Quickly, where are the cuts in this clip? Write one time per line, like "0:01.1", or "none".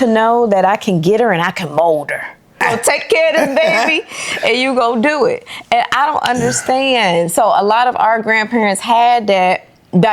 0:02.6